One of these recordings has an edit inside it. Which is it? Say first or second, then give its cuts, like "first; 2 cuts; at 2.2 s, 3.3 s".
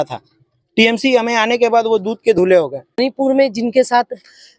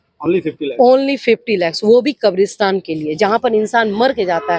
first; 1 cut; at 3.0 s